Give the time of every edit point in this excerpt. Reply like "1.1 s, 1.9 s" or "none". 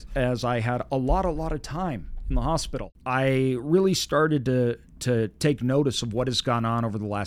2.9 s